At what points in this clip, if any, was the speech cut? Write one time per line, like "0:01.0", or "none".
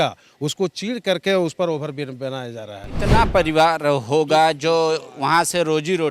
0:03.0